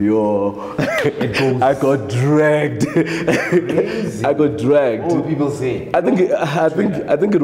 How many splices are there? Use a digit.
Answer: 0